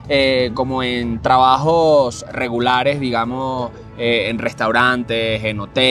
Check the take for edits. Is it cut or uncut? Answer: uncut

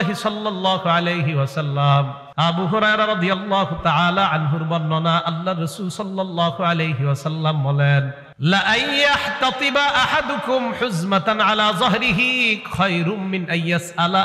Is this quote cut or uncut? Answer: cut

